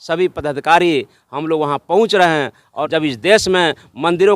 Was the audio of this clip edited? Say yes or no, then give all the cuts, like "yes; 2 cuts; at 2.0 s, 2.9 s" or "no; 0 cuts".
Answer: yes; 1 cut; at 2.8 s